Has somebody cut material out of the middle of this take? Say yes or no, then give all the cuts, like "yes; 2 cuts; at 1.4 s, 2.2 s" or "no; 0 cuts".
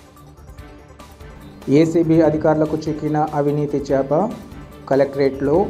yes; 1 cut; at 1.2 s